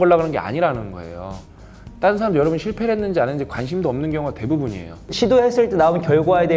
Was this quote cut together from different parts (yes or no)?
yes